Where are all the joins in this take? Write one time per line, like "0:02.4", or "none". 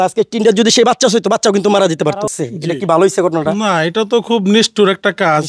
0:02.3